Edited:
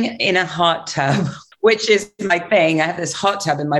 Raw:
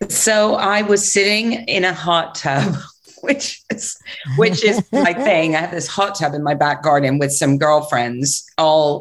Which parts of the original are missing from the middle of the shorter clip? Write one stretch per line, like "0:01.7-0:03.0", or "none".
0:02.9-0:04.2